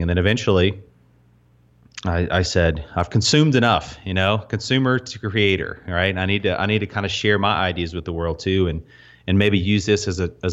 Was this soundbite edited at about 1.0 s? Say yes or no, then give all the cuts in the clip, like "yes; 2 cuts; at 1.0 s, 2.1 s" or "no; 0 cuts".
no; 0 cuts